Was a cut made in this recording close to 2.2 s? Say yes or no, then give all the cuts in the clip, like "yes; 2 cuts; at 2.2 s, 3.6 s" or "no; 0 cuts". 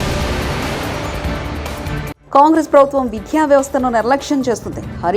yes; 1 cut; at 2.2 s